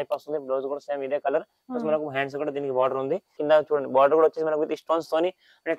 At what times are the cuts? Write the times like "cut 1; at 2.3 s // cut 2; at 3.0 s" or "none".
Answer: cut 1; at 3.4 s